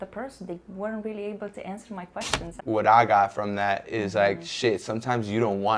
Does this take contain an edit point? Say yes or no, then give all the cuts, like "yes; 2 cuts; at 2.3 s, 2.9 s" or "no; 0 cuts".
yes; 1 cut; at 2.5 s